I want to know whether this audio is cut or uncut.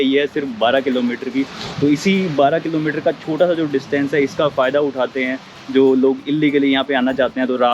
uncut